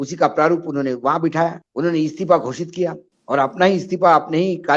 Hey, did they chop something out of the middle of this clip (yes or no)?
yes